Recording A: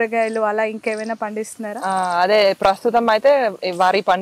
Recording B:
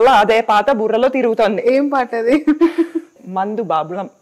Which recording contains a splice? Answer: B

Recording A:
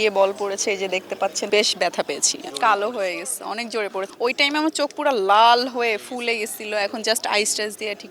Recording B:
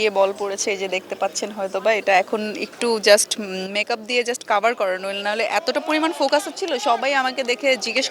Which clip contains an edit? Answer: A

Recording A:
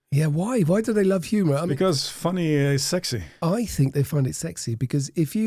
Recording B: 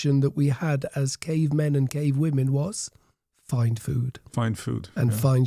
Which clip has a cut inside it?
A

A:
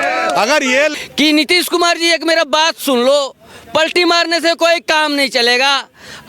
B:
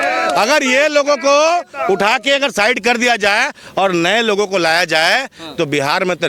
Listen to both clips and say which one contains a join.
A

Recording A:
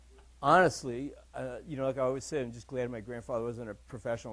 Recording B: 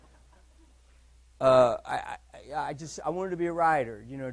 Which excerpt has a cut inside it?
B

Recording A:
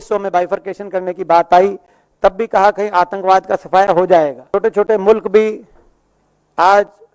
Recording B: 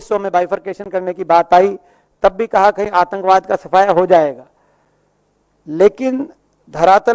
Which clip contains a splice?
A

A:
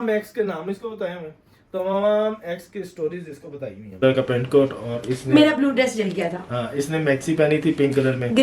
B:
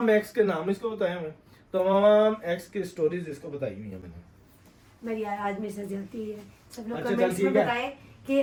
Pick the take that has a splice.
A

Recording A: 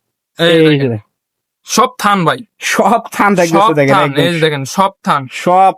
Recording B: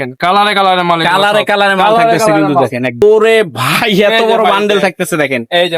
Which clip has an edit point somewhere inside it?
B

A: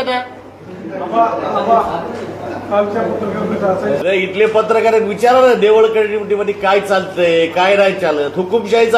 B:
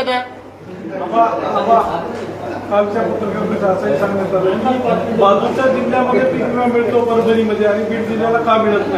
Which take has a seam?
A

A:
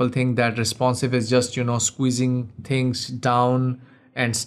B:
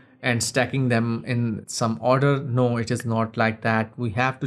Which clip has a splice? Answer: B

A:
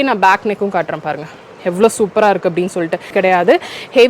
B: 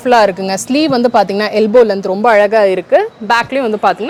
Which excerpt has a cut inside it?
A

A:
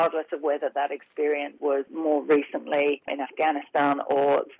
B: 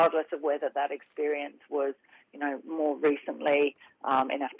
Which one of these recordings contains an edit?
A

